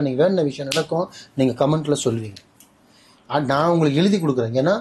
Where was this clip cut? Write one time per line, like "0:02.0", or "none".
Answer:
none